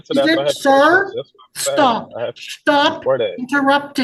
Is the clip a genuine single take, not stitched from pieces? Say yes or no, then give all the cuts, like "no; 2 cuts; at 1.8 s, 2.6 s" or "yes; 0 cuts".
yes; 0 cuts